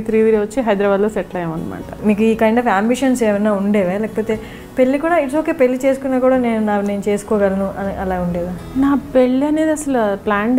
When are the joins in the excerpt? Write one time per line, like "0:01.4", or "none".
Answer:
0:01.9